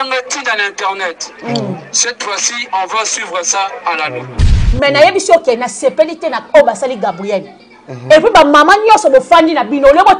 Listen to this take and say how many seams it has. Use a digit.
1